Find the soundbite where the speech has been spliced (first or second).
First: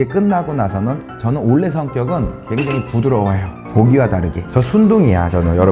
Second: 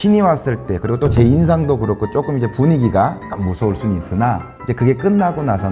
first